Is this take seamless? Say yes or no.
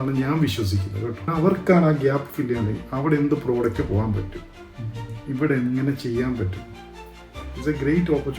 no